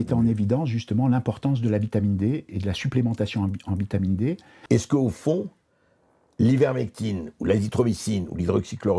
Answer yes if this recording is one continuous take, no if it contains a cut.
no